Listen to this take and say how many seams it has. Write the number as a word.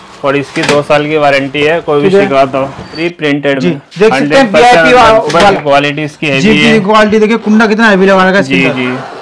two